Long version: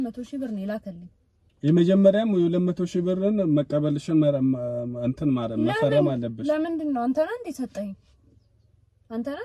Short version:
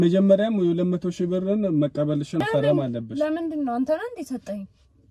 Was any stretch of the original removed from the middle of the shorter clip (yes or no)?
yes